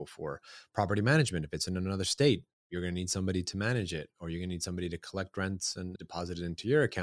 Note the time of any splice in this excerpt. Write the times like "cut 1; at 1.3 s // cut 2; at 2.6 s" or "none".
cut 1; at 5.9 s